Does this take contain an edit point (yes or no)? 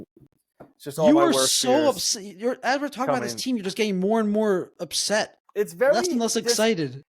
yes